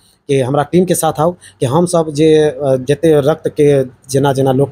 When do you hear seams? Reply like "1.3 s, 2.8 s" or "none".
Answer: none